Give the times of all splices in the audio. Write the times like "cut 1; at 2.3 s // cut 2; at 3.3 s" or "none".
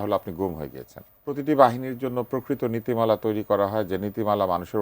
cut 1; at 1.4 s